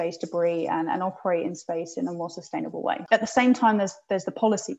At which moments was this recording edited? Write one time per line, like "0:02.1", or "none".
0:03.0